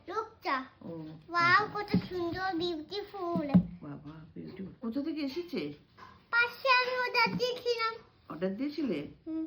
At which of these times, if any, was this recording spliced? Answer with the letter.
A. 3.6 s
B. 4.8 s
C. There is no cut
B